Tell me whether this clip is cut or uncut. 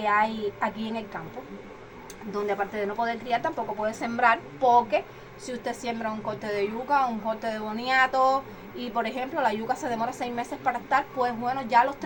uncut